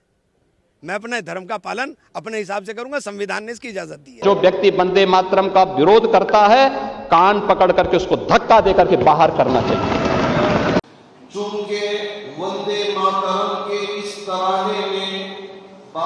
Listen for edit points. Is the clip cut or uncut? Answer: cut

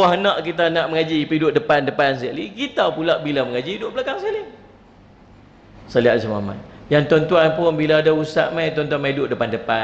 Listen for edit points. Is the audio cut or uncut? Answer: cut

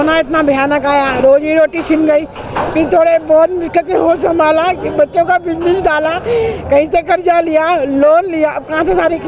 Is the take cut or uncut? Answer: uncut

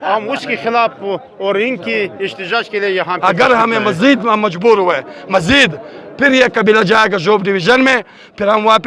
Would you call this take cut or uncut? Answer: cut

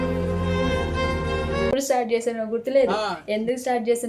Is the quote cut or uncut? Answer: cut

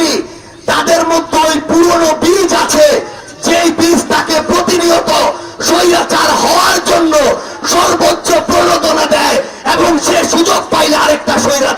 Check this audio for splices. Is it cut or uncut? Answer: uncut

